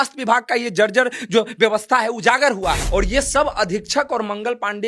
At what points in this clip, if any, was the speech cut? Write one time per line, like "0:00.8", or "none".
0:02.8